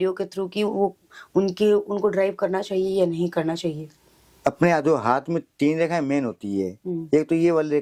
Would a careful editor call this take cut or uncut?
uncut